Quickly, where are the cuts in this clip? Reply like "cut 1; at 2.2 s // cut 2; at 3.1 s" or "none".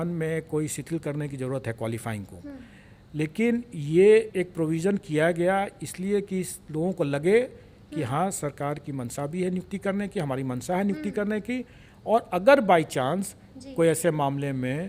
none